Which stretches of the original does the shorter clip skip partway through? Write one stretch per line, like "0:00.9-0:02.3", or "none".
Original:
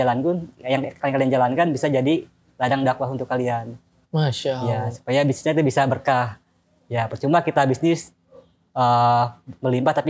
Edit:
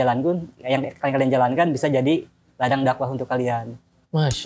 none